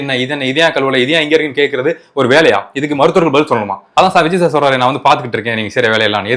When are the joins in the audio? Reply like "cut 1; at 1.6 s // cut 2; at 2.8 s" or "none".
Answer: cut 1; at 3.8 s